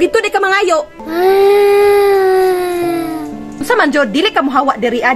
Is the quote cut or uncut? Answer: cut